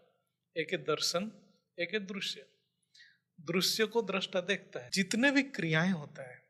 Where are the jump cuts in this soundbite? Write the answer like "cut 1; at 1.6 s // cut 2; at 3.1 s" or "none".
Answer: cut 1; at 4.8 s

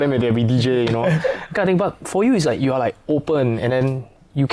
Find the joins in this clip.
none

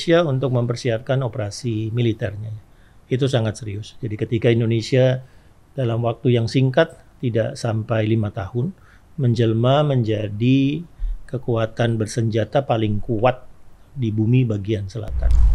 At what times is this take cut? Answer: none

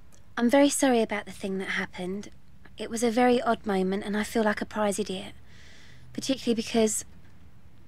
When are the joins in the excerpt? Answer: cut 1; at 5.7 s

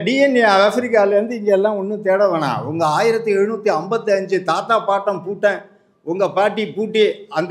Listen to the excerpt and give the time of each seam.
none

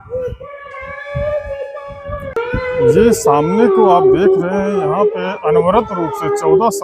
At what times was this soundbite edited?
cut 1; at 2.3 s

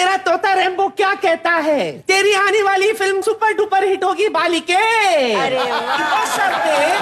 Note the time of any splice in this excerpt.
cut 1; at 2.0 s

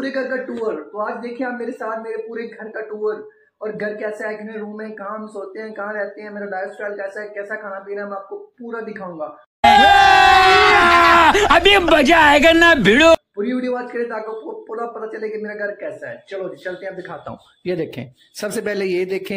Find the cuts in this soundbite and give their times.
none

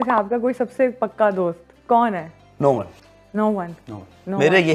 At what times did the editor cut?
none

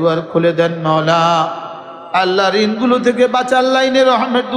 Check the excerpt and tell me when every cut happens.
none

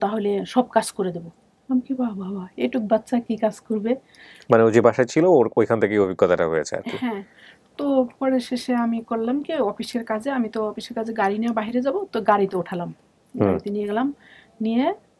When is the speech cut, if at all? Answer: none

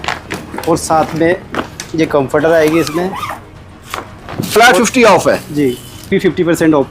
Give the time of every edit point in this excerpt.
cut 1; at 4.5 s // cut 2; at 6.1 s

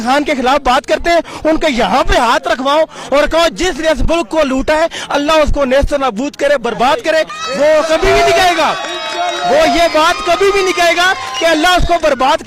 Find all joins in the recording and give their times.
cut 1; at 7.4 s

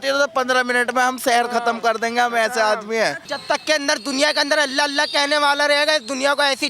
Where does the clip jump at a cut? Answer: cut 1; at 3.3 s

